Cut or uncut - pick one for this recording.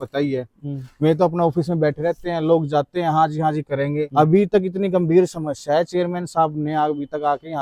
uncut